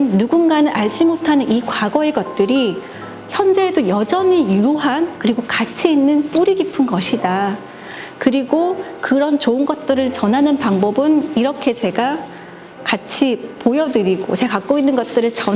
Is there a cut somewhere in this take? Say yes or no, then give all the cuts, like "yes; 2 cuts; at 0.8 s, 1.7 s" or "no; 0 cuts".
no; 0 cuts